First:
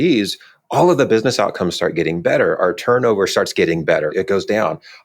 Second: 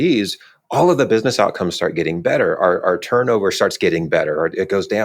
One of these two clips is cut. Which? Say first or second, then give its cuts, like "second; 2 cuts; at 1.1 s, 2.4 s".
first; 2 cuts; at 2.6 s, 4.1 s